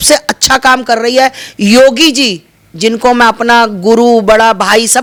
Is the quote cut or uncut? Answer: uncut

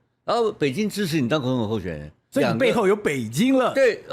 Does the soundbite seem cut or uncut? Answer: cut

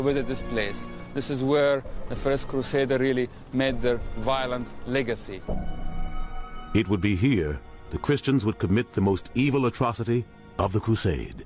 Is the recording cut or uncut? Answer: uncut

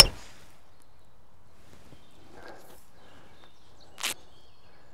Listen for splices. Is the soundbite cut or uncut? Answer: uncut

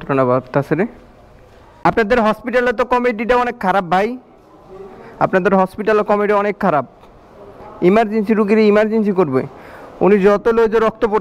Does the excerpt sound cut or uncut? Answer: cut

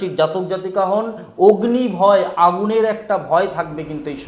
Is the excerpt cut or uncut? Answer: uncut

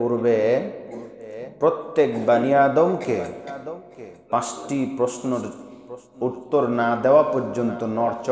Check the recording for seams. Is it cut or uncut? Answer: uncut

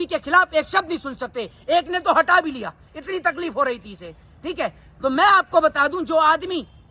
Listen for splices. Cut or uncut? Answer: uncut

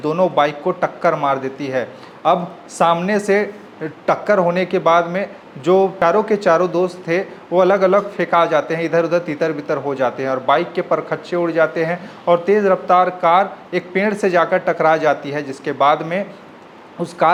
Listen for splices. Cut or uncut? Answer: uncut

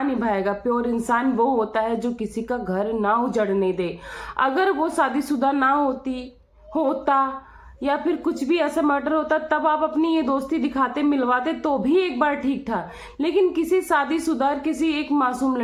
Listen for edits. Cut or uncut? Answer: uncut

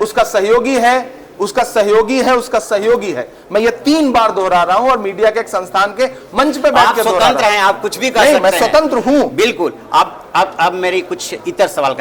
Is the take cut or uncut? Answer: uncut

